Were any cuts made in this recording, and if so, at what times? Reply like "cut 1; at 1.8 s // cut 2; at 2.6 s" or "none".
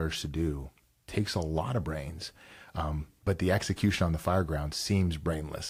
none